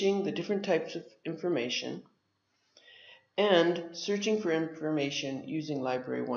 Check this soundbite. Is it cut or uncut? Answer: uncut